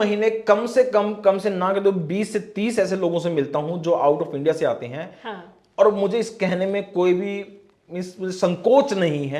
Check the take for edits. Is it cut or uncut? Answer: uncut